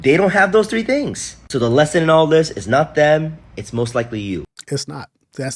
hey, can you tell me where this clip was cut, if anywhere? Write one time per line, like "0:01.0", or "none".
none